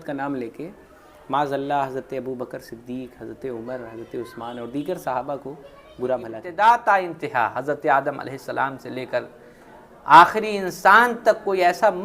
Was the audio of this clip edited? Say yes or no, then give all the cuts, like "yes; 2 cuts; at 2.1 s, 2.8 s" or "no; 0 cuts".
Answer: yes; 1 cut; at 6.4 s